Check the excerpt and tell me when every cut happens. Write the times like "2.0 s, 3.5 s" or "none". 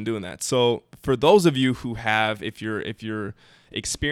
none

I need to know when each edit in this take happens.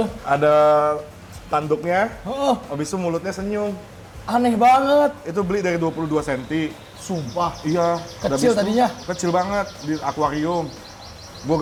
none

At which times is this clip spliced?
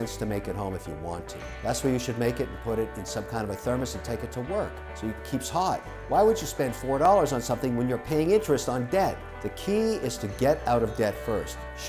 none

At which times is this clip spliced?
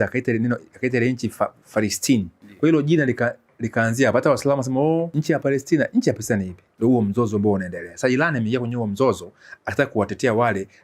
2.4 s, 5.1 s, 6.6 s

